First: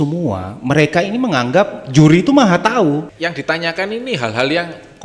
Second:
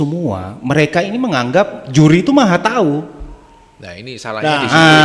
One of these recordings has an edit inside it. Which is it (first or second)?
first